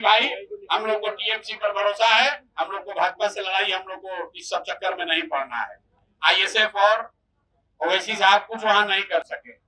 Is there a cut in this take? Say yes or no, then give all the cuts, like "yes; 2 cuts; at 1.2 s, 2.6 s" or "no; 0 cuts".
no; 0 cuts